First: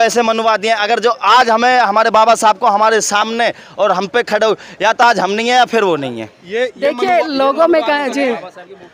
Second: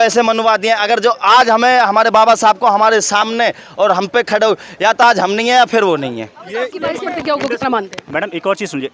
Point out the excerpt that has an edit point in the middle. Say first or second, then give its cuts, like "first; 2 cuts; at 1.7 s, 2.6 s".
second; 1 cut; at 6.9 s